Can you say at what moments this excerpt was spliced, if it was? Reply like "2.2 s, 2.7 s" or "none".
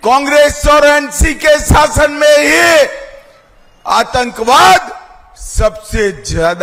none